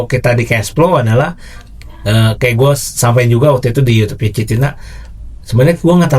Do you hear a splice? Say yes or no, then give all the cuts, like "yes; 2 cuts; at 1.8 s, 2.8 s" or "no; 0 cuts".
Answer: no; 0 cuts